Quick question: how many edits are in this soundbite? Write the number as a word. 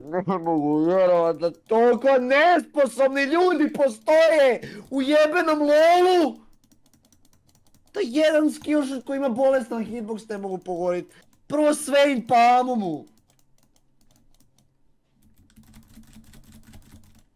zero